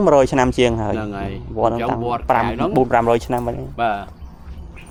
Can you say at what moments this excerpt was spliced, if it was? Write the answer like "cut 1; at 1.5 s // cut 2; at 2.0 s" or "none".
none